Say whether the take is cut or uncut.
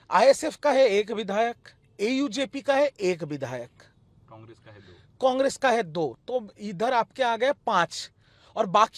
uncut